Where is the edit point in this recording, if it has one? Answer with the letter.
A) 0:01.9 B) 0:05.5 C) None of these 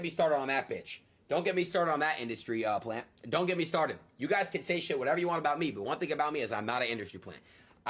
B